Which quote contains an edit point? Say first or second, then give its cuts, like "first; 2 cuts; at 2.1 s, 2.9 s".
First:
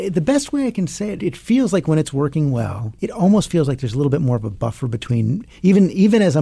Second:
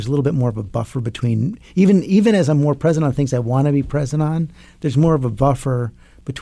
first; 2 cuts; at 1.2 s, 2.9 s